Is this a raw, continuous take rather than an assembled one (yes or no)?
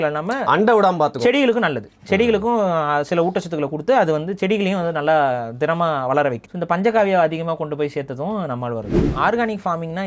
no